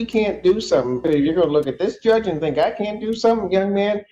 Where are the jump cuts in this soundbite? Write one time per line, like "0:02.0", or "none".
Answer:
0:01.0